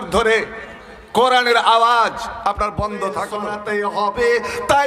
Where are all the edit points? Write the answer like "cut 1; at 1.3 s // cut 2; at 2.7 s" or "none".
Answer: cut 1; at 3.5 s